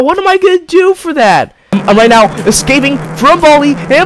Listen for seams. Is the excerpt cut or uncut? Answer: cut